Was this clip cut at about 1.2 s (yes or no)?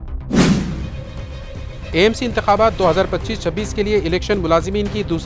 yes